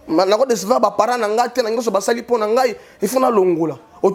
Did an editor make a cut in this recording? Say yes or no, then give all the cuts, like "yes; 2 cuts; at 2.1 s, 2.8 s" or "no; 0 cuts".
no; 0 cuts